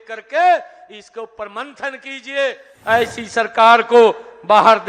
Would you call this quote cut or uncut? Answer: cut